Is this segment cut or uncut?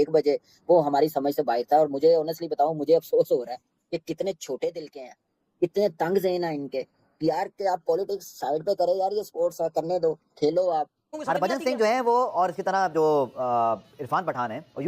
cut